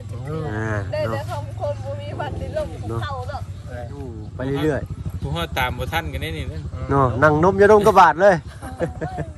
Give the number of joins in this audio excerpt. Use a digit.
1